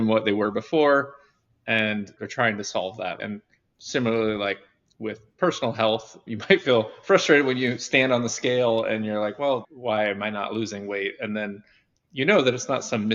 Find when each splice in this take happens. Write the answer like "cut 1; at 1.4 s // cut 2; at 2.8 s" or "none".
cut 1; at 2.2 s // cut 2; at 3.2 s